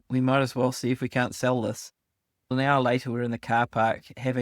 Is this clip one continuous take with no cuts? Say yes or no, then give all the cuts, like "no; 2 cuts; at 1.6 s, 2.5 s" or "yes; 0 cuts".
no; 1 cut; at 2.5 s